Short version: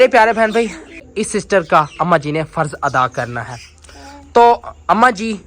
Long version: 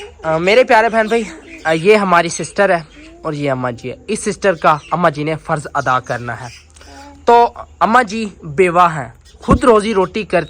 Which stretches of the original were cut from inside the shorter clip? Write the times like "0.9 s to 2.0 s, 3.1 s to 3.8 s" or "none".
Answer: 1.5 s to 3.8 s